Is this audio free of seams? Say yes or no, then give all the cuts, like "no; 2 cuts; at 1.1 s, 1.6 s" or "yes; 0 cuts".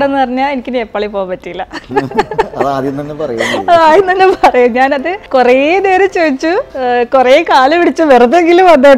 no; 2 cuts; at 5.1 s, 6.7 s